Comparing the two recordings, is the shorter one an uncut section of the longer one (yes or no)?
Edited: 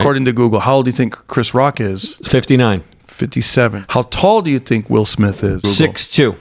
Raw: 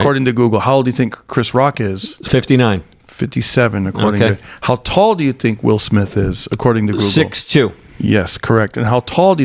no